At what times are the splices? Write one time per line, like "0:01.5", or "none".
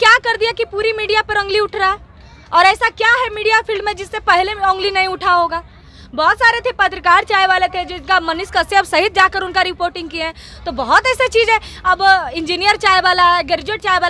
none